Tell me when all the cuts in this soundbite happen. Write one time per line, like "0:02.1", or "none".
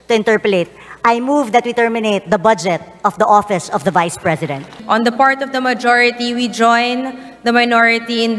0:04.8

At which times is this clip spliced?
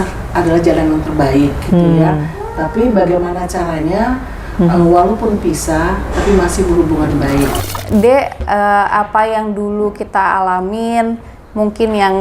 0:07.6

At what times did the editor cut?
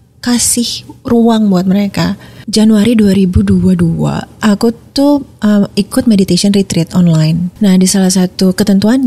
0:02.3
0:04.3
0:07.5

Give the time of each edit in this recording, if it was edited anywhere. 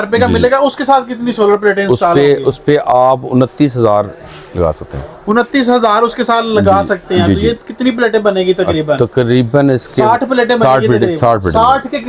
none

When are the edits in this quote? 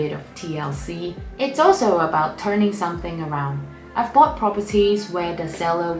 0:01.2

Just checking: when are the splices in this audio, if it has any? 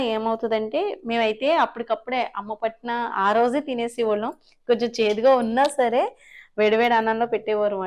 none

